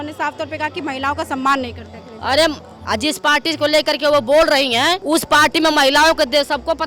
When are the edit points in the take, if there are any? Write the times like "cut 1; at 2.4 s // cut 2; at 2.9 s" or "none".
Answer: cut 1; at 2.8 s // cut 2; at 5.0 s